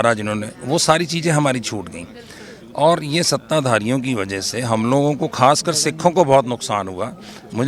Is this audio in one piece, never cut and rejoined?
yes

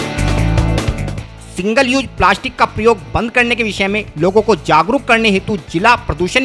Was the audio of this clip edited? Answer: yes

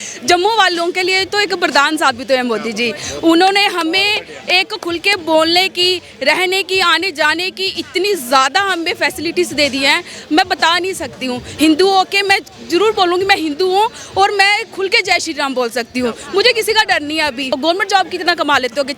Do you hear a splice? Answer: yes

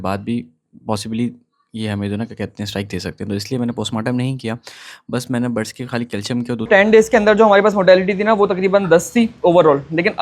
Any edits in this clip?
yes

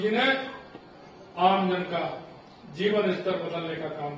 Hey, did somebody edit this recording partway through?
no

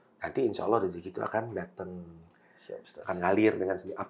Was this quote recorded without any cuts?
yes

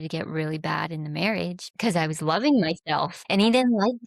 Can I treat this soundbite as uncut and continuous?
no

